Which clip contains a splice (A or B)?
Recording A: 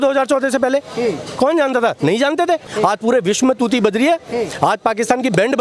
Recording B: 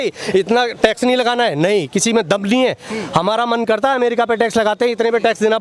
A